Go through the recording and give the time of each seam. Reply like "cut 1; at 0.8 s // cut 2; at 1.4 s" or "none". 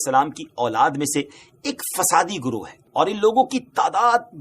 cut 1; at 2.7 s